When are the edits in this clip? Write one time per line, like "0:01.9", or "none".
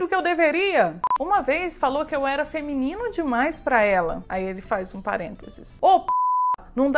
0:01.1